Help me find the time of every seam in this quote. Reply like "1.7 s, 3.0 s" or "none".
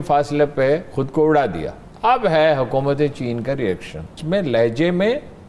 none